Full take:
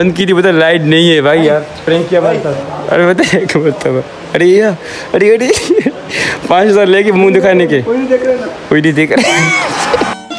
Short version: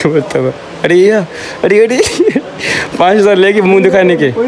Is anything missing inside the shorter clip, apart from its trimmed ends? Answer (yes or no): no